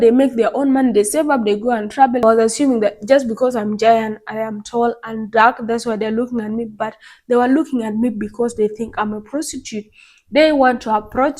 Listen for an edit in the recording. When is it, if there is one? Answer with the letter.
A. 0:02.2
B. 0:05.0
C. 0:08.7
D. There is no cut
A